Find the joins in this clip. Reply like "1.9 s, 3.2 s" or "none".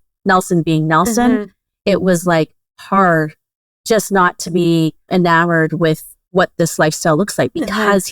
5.0 s, 6.1 s